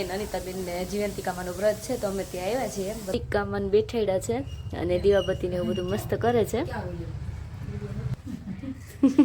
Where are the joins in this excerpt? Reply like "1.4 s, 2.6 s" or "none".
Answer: 3.1 s, 8.1 s